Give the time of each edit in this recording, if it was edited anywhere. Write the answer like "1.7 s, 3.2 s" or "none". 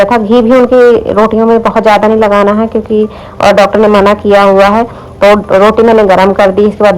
none